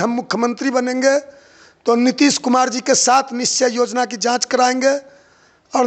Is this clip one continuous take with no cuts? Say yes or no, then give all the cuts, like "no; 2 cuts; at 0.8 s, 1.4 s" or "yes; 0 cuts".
yes; 0 cuts